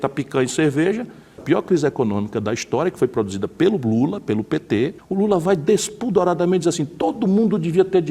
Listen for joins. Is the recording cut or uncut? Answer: cut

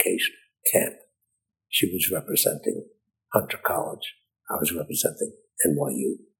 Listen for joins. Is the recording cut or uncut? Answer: uncut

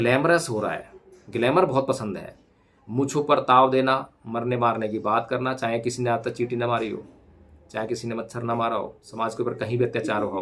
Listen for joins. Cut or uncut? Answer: cut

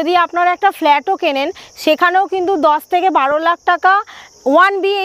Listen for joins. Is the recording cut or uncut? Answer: uncut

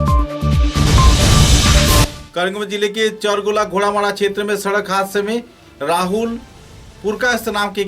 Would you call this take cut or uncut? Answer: cut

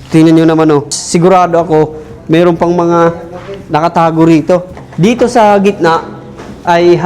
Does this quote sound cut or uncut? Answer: cut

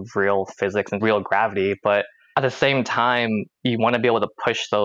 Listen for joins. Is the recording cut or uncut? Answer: cut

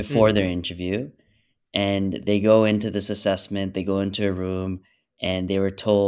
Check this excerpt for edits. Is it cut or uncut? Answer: uncut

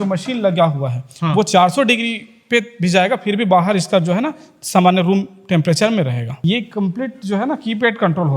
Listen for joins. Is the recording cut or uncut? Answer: cut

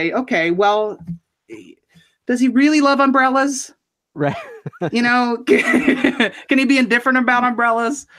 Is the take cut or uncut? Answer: uncut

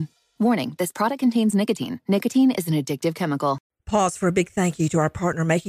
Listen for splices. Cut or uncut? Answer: cut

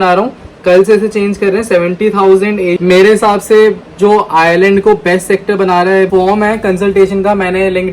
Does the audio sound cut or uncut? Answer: cut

